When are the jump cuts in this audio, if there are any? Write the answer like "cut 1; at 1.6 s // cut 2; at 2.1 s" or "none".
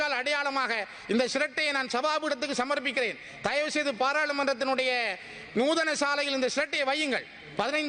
none